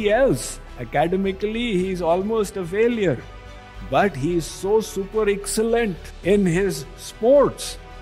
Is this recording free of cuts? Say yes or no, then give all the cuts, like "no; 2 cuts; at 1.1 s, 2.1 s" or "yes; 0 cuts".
no; 1 cut; at 6.1 s